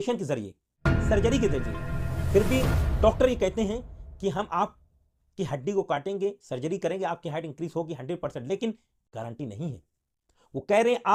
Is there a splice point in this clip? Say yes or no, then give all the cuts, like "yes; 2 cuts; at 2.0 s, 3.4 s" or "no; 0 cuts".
no; 0 cuts